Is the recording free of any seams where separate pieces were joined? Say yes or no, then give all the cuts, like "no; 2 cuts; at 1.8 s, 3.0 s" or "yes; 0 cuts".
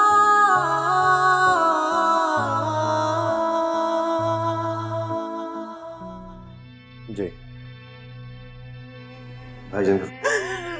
no; 1 cut; at 6.2 s